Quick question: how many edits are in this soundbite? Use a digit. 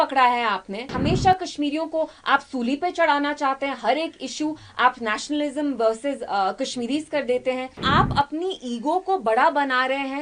2